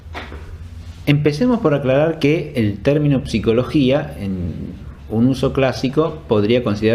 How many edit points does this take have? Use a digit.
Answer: 1